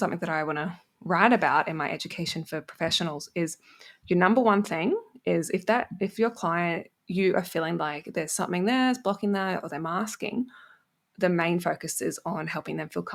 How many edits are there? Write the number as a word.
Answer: zero